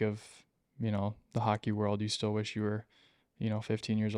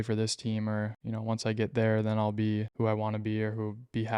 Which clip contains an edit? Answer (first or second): second